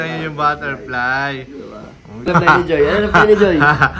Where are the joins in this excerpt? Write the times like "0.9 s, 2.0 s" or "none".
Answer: 2.3 s